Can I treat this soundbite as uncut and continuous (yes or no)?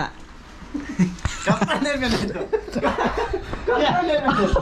yes